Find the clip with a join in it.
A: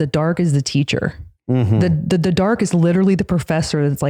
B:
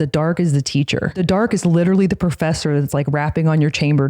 B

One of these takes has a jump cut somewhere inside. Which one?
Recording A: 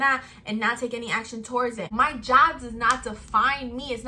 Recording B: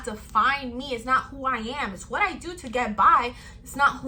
A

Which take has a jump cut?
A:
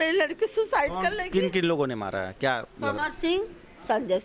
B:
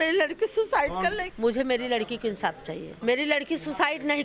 B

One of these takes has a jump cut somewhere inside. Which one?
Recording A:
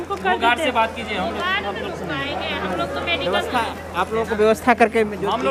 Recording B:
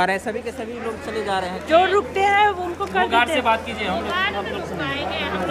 B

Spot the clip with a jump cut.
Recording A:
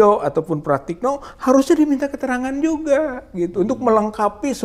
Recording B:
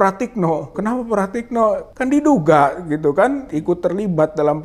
B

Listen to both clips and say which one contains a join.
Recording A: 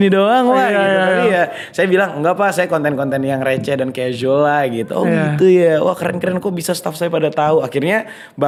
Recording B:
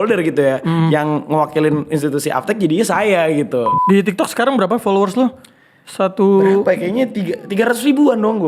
B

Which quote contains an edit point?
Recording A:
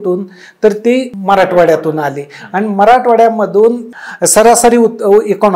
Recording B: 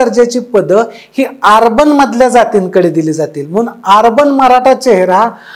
A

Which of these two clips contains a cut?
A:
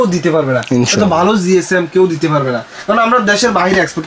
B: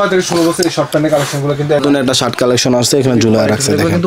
B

